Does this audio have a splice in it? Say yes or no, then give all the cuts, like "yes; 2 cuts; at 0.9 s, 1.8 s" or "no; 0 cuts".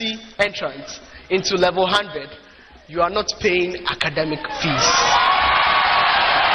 no; 0 cuts